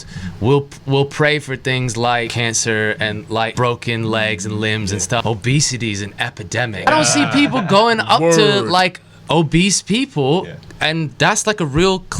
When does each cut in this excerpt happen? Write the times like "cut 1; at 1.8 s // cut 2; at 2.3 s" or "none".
cut 1; at 2.3 s // cut 2; at 3.5 s // cut 3; at 5.2 s // cut 4; at 6.9 s

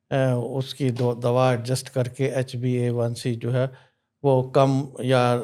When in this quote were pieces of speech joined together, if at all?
none

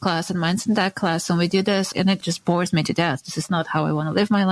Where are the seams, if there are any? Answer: cut 1; at 1.9 s

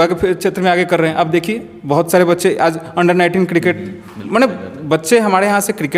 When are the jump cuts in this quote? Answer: none

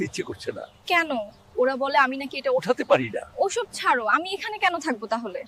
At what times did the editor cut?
none

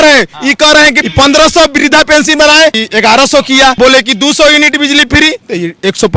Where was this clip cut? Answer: cut 1; at 1.0 s // cut 2; at 2.8 s // cut 3; at 3.8 s

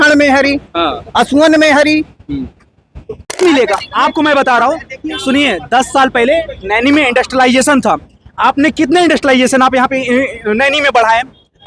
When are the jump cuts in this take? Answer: cut 1; at 3.4 s

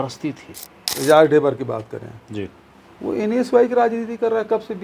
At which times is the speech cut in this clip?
cut 1; at 0.9 s

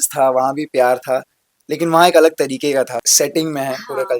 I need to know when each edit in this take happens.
cut 1; at 3.0 s

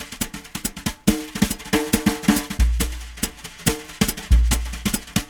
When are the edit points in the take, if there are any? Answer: cut 1; at 3.9 s

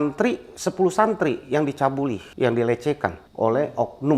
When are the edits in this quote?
cut 1; at 2.2 s // cut 2; at 3.2 s

